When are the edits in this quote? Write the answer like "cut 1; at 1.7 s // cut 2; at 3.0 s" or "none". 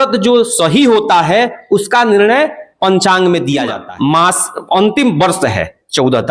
cut 1; at 3.8 s

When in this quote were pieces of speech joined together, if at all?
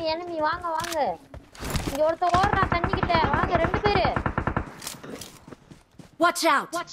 none

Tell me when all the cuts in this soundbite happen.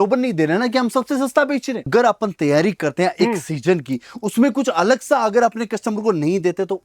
cut 1; at 1.9 s

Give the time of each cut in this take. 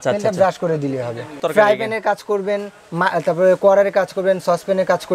cut 1; at 1.4 s

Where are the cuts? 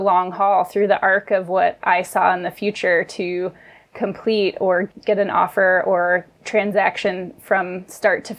none

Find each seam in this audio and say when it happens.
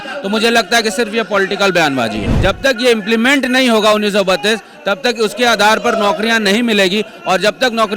cut 1; at 2.3 s

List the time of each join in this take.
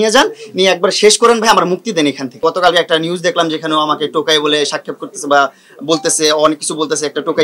cut 1; at 2.3 s

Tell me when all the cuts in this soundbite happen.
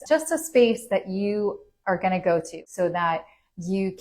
cut 1; at 2.6 s

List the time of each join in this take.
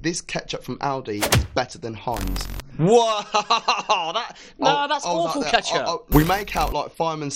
cut 1; at 6.0 s

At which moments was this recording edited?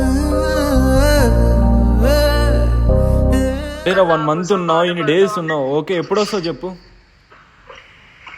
cut 1; at 3.9 s

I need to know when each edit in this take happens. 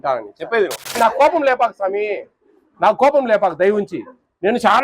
cut 1; at 1.0 s

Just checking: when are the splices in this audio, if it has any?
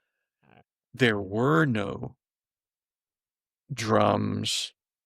none

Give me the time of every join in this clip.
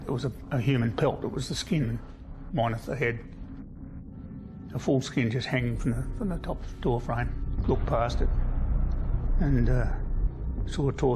none

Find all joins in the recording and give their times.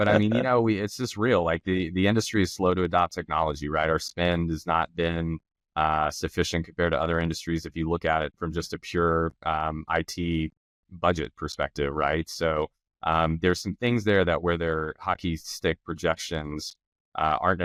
none

